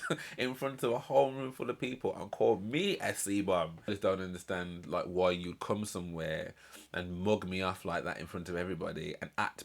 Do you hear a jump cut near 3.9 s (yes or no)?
yes